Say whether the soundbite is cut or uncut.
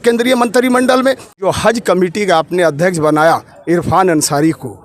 cut